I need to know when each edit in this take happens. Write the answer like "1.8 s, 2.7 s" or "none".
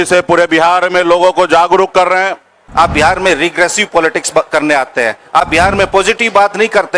2.6 s

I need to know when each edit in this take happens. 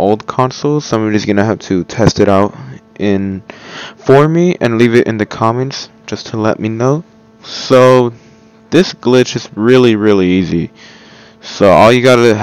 9.4 s

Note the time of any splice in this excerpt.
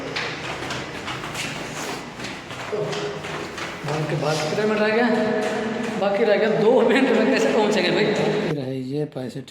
8.5 s

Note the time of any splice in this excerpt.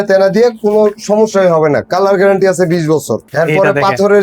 3.3 s

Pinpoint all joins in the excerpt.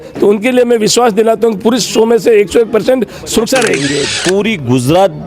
3.8 s

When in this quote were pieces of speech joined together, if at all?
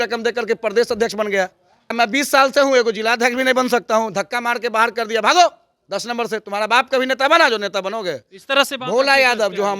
1.9 s

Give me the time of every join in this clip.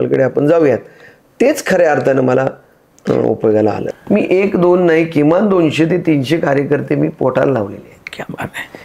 3.8 s

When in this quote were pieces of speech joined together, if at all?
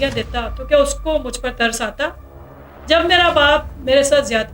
none

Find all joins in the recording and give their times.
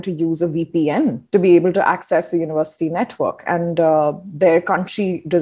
1.2 s

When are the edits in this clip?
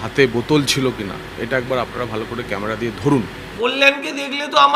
3.6 s

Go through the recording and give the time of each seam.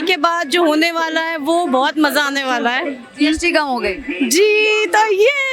none

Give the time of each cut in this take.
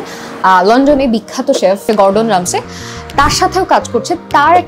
1.8 s

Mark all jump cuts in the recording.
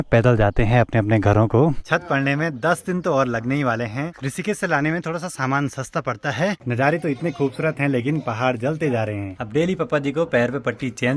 1.8 s, 4.2 s, 6.6 s, 9.3 s

